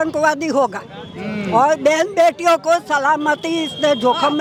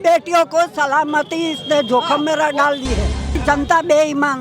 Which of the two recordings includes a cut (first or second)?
second